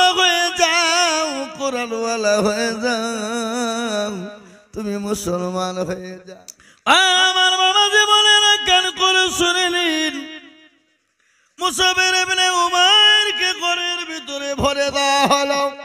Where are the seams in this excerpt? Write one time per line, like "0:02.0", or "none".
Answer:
0:06.1